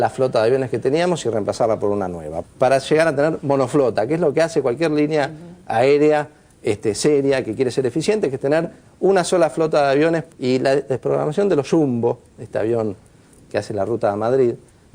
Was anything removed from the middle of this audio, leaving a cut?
no; 0 cuts

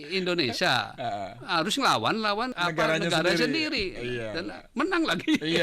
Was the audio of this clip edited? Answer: yes; 1 cut; at 2.5 s

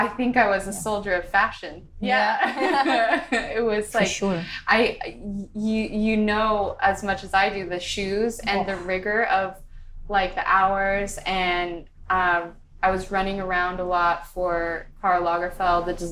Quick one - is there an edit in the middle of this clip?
no; 0 cuts

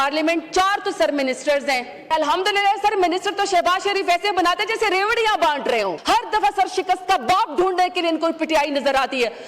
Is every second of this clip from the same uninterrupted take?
no; 2 cuts; at 2.1 s, 6.0 s

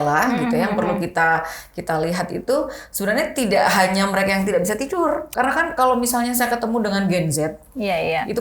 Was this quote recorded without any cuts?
no; 1 cut; at 5.3 s

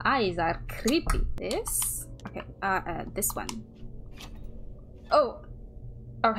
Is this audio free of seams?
yes; 0 cuts

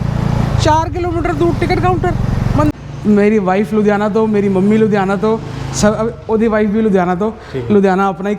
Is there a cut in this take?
yes; 1 cut; at 2.7 s

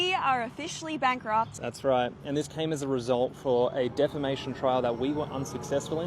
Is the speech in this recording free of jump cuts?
no; 1 cut; at 1.6 s

